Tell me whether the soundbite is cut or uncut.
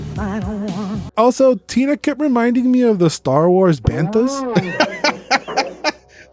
cut